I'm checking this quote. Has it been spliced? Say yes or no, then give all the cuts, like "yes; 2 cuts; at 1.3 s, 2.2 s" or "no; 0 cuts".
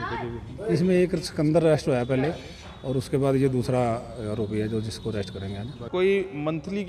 yes; 1 cut; at 5.8 s